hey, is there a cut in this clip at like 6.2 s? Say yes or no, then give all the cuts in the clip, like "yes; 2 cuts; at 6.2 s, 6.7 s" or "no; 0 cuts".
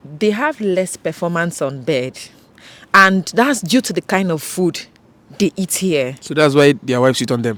no; 0 cuts